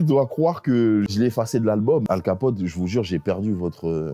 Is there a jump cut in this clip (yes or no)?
yes